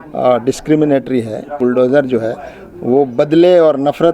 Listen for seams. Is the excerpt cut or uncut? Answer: cut